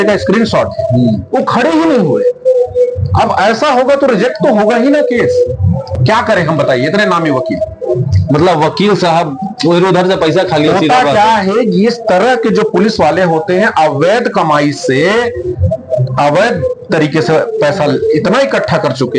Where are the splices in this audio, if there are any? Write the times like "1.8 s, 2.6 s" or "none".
none